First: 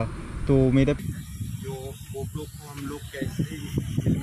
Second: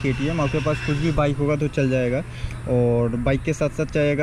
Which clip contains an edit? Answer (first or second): first